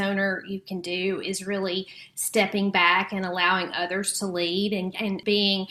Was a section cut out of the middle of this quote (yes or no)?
no